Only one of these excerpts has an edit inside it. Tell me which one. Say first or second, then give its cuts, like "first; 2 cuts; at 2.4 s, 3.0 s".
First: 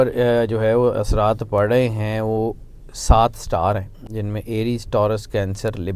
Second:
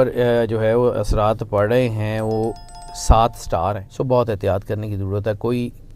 second; 1 cut; at 3.9 s